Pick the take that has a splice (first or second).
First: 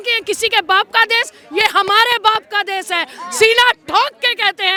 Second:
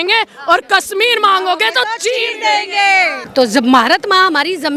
second